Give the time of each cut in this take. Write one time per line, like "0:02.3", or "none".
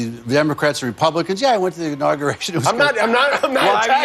none